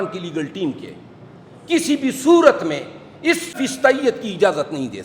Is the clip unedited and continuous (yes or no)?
no